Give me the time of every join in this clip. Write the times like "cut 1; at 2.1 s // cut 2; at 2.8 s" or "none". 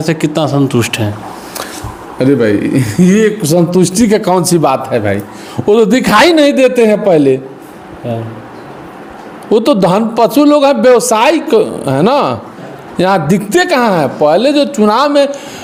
none

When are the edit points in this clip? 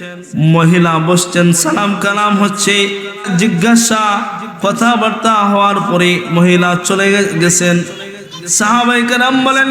cut 1; at 3.3 s

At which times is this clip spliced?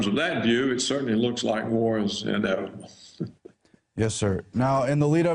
none

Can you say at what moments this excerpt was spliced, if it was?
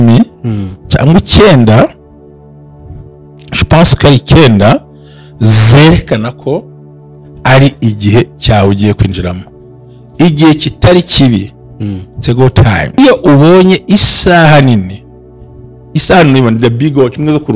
cut 1; at 13.0 s

